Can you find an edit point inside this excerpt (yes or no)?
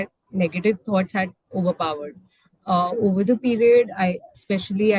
no